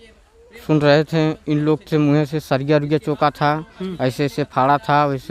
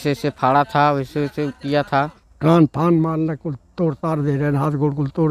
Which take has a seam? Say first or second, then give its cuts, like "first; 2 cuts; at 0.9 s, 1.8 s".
second; 1 cut; at 2.2 s